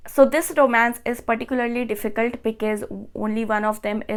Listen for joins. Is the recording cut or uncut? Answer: uncut